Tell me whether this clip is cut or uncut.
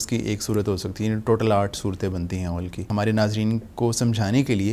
cut